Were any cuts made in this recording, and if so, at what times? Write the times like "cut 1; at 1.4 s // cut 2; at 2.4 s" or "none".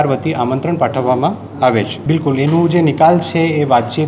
cut 1; at 2.0 s

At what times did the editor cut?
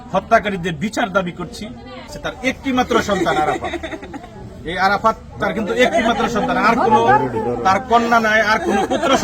cut 1; at 2.1 s

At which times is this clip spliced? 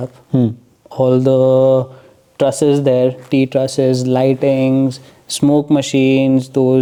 none

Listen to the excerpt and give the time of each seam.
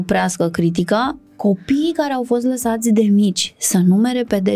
cut 1; at 1.2 s

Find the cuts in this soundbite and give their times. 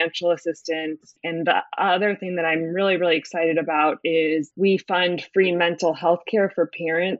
cut 1; at 1.2 s // cut 2; at 4.5 s

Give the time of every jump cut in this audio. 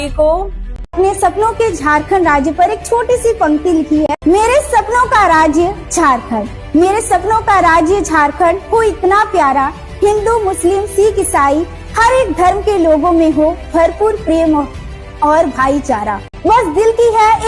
cut 1; at 0.9 s // cut 2; at 4.1 s // cut 3; at 16.2 s

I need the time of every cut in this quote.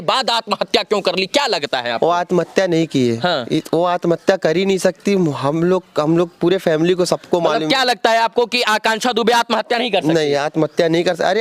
none

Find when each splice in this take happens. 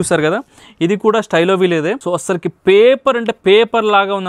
cut 1; at 2.0 s

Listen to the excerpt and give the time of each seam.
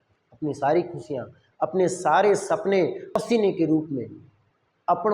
cut 1; at 3.1 s

